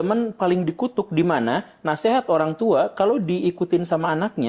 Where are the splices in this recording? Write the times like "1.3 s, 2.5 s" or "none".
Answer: none

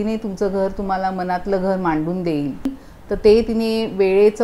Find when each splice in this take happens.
2.7 s

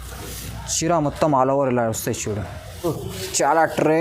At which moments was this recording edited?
2.9 s

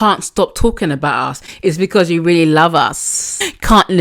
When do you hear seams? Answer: none

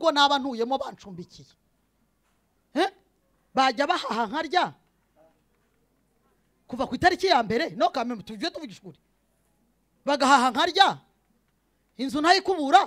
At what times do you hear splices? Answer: none

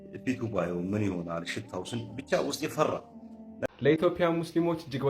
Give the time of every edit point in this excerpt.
3.7 s

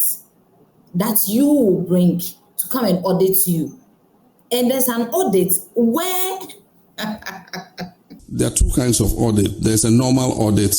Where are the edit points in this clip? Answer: 8.0 s

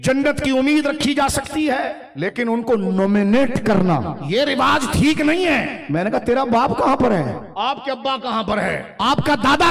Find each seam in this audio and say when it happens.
2.0 s, 4.2 s, 5.8 s, 7.5 s, 8.9 s

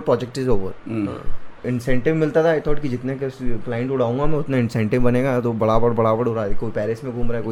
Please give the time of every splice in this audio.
none

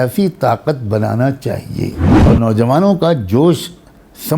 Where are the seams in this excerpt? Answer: 2.1 s

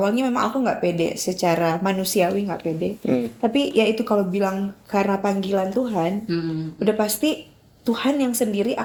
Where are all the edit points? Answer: none

